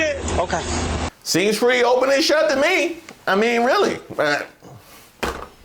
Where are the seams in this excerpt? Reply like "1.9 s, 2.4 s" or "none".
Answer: 1.1 s